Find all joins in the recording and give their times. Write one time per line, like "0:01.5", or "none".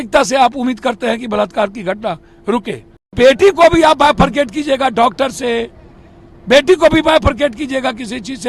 0:03.1

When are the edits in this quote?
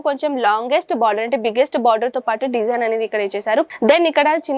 0:03.7

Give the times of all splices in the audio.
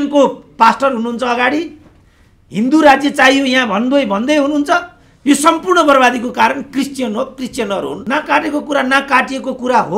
0:08.0

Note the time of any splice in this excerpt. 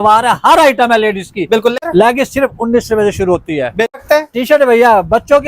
0:01.8
0:04.0

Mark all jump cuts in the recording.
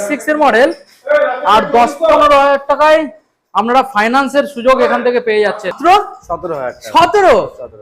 0:05.8

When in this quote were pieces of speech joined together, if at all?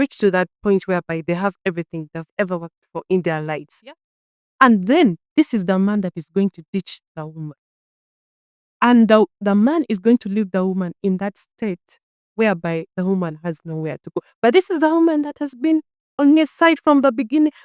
none

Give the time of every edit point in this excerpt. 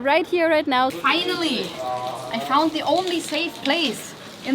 0:01.0

